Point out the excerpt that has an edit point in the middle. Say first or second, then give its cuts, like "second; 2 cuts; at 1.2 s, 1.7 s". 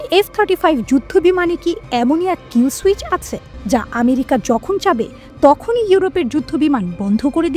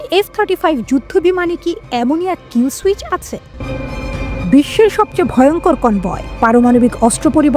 second; 1 cut; at 3.5 s